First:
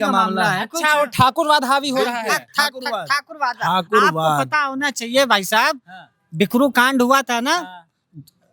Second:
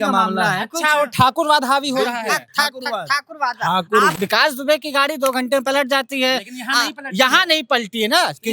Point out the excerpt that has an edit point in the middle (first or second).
second